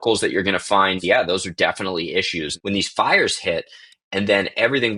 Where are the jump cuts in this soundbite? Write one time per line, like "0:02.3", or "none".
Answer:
0:01.0
0:02.5